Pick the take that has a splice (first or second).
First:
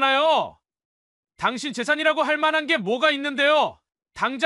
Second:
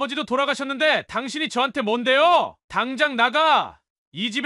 second